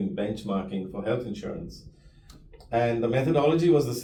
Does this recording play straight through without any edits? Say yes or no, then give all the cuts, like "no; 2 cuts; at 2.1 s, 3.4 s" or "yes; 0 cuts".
yes; 0 cuts